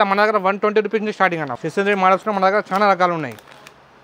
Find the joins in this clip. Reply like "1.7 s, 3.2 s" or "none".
1.5 s